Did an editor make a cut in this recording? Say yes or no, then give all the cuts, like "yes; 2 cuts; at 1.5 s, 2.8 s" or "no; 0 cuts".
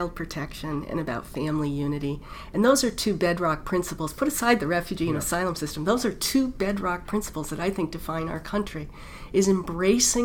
no; 0 cuts